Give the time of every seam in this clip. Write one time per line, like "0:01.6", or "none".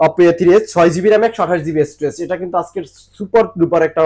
none